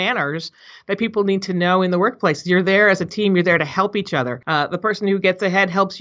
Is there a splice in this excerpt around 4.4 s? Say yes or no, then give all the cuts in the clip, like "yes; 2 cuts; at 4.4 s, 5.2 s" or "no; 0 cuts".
yes; 1 cut; at 4.4 s